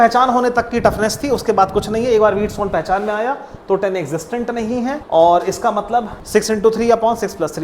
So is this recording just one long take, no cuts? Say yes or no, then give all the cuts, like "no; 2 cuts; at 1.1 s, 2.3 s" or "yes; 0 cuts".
no; 2 cuts; at 5.0 s, 6.2 s